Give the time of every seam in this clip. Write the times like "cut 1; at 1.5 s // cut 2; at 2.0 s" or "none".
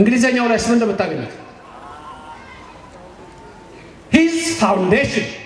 none